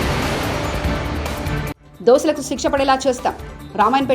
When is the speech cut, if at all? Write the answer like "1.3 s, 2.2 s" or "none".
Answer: 1.7 s

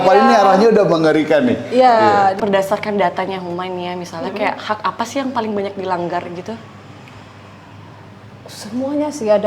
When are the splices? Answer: 2.3 s

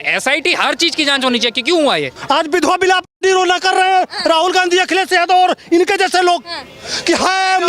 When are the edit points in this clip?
2.1 s

